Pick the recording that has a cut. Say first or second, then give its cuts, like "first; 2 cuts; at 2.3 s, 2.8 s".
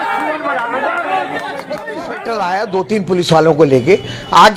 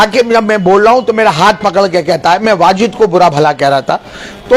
first; 1 cut; at 2.1 s